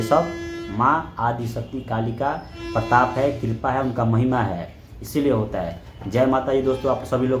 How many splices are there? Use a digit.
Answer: 0